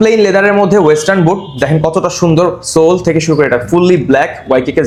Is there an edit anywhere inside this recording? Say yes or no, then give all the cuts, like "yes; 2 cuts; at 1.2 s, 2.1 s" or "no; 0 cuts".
no; 0 cuts